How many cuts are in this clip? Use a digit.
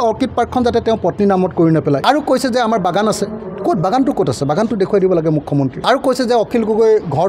2